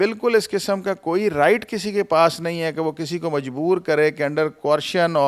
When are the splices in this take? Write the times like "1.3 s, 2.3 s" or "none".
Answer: none